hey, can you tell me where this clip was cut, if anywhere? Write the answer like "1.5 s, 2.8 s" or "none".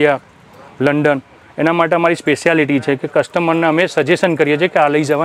none